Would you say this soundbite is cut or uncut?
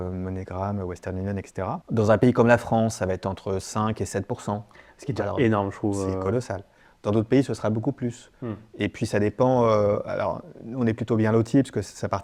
cut